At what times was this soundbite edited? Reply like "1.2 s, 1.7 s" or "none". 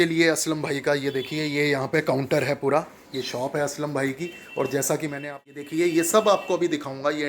5.2 s

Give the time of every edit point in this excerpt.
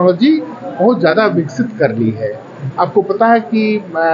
none

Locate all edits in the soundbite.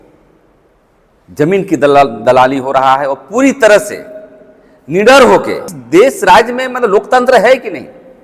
5.8 s

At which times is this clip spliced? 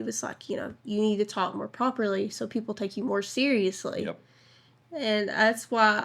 4.8 s

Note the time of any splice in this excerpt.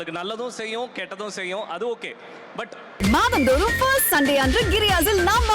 2.9 s

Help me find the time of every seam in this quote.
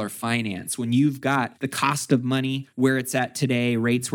1.6 s, 2.7 s

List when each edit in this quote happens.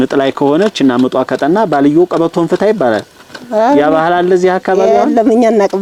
none

